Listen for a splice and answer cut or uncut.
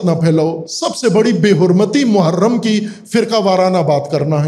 uncut